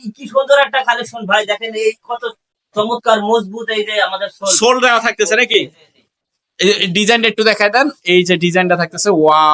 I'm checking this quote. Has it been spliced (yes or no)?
no